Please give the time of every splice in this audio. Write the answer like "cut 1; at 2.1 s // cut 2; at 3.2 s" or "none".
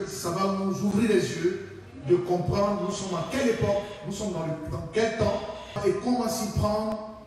cut 1; at 5.8 s